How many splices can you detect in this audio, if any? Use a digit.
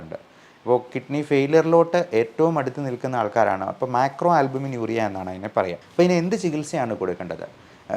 1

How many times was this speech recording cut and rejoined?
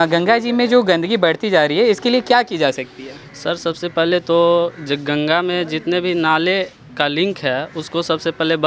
0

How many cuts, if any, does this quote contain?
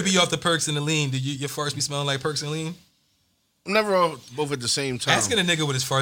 0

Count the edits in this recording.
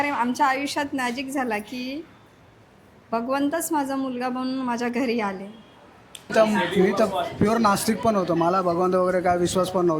1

